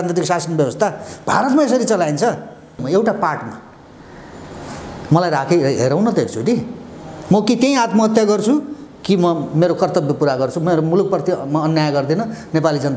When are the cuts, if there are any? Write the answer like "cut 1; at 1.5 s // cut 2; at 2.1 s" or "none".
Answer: cut 1; at 2.8 s